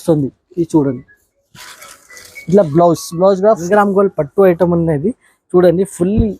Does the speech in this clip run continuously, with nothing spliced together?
no; 1 cut; at 3.6 s

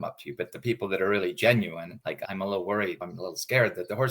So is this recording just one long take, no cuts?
no; 2 cuts; at 2.2 s, 3.1 s

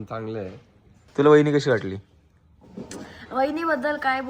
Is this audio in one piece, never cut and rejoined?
no; 1 cut; at 1.0 s

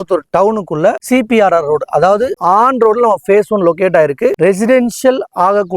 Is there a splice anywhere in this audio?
yes; 2 cuts; at 2.3 s, 4.4 s

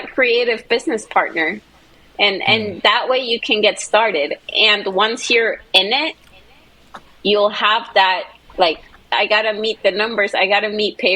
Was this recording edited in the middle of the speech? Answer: yes; 1 cut; at 9.1 s

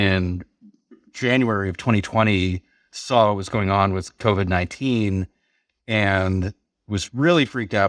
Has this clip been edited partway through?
no; 0 cuts

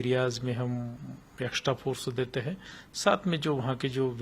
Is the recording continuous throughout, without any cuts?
yes; 0 cuts

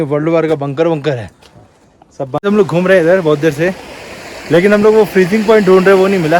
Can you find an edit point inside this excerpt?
yes; 1 cut; at 2.4 s

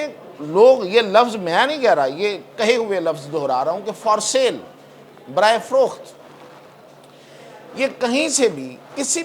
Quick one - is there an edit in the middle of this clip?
no; 0 cuts

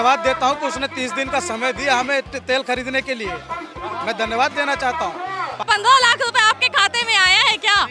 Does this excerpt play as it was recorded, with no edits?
no; 1 cut; at 5.6 s

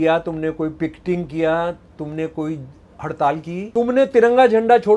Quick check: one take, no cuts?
no; 1 cut; at 3.7 s

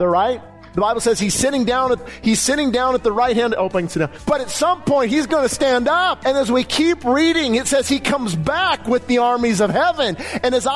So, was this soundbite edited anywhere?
yes; 2 cuts; at 4.2 s, 6.2 s

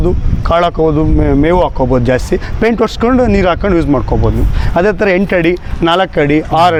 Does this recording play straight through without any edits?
yes; 0 cuts

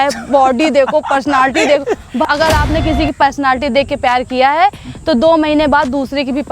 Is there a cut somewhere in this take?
yes; 1 cut; at 2.2 s

